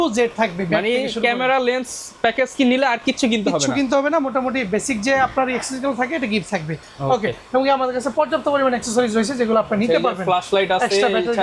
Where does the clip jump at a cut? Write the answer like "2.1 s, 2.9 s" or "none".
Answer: none